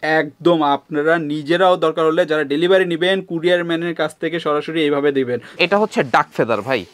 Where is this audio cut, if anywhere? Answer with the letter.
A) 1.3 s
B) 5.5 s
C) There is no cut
B